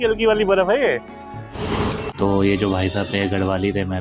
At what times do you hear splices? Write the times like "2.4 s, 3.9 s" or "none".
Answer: 2.0 s

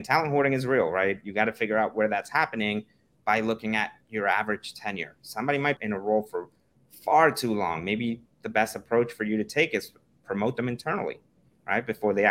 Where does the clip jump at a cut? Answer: 5.8 s

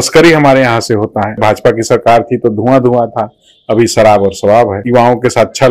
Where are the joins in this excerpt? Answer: 1.4 s, 4.8 s

